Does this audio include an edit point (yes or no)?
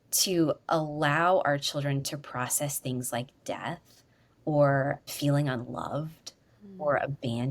yes